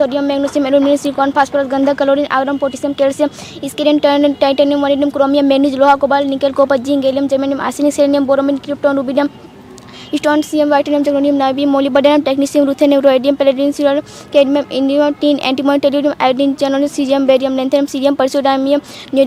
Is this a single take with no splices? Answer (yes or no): yes